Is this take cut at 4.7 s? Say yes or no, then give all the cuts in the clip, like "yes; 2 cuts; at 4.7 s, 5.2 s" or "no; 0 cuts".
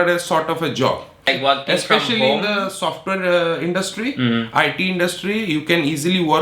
no; 1 cut; at 1.3 s